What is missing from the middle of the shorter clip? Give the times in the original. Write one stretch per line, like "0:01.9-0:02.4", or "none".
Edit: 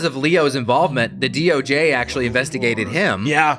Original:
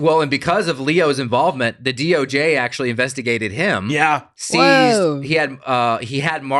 none